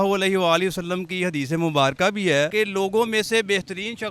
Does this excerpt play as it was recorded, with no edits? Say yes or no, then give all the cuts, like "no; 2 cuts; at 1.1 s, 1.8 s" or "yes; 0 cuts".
no; 1 cut; at 2.5 s